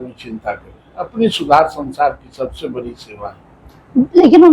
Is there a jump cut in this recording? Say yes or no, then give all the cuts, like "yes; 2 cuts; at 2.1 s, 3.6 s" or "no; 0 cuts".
no; 0 cuts